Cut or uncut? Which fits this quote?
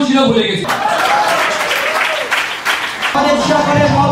cut